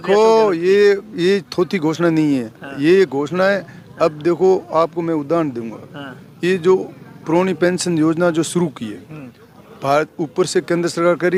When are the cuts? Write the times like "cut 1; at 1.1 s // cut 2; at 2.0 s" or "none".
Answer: none